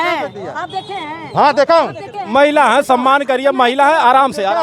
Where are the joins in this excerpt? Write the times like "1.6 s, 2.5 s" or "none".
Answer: none